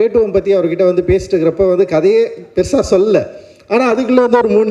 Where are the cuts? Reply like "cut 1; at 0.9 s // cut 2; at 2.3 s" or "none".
none